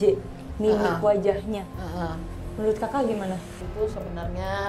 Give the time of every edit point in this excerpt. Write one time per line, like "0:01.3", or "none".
0:03.6